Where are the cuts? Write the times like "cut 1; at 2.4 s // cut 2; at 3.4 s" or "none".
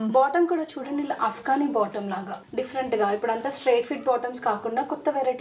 cut 1; at 2.4 s